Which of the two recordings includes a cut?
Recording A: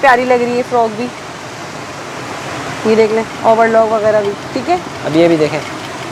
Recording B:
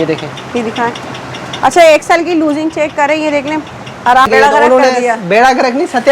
B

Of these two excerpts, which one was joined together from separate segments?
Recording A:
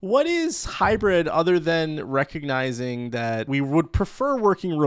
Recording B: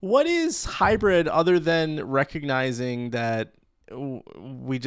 A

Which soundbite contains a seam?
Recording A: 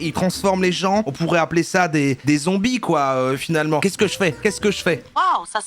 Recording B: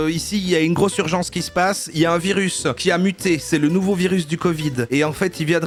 A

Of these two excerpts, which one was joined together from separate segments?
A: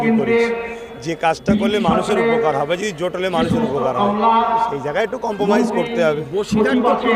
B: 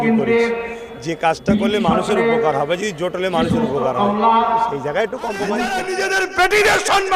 B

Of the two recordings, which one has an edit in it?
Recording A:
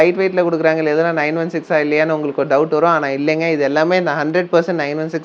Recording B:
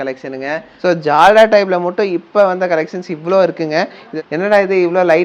B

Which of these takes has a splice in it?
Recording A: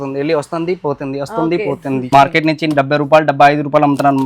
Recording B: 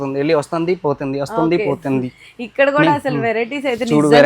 A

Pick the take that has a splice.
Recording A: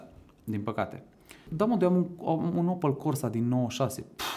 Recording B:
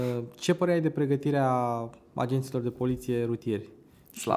A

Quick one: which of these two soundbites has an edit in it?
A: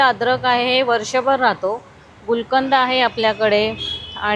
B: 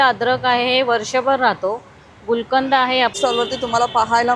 B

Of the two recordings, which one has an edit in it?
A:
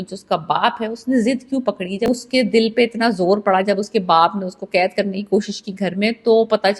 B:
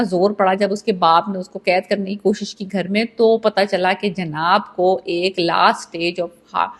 A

